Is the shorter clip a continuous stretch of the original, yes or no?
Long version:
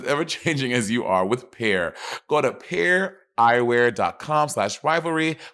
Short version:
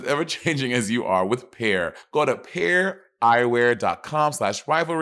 no